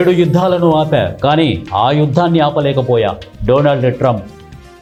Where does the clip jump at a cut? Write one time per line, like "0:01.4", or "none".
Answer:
none